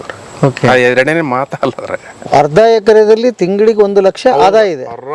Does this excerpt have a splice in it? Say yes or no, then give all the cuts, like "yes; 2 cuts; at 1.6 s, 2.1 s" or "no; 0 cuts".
yes; 1 cut; at 2.3 s